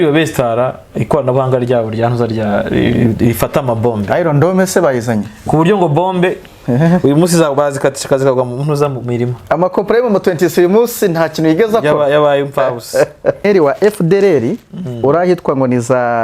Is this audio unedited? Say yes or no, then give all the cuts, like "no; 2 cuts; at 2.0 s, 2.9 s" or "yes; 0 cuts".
no; 1 cut; at 13.4 s